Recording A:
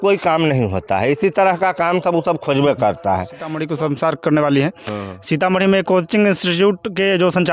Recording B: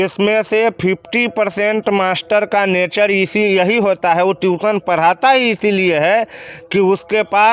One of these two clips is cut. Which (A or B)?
A